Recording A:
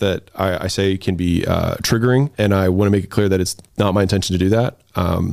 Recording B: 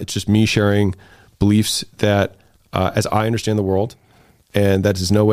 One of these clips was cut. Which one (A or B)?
A